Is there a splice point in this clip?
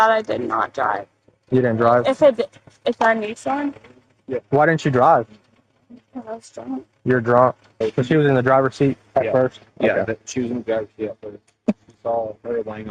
yes; 1 cut; at 7.8 s

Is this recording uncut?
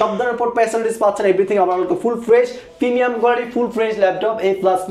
yes; 0 cuts

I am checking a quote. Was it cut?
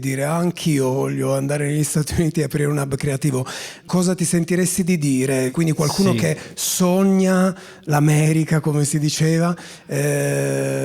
yes; 2 cuts; at 3.9 s, 5.5 s

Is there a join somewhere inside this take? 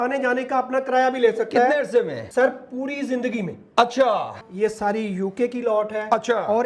yes; 2 cuts; at 2.2 s, 4.4 s

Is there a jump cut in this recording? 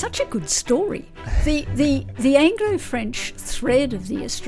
no; 0 cuts

